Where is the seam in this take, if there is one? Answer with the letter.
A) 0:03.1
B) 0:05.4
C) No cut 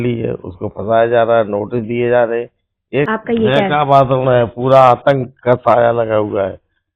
A